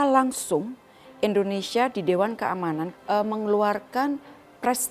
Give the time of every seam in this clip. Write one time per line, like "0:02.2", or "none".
0:02.9